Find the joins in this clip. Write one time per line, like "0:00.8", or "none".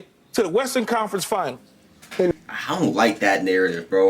0:02.3